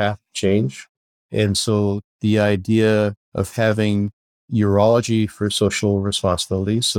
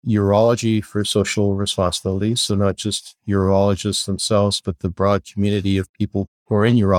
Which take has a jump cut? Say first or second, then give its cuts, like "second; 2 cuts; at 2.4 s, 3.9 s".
first; 1 cut; at 3.2 s